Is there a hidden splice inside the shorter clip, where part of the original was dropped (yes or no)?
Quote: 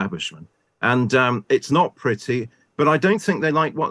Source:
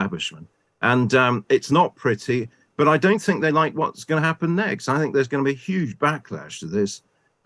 no